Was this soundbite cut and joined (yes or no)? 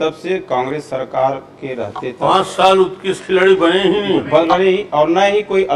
no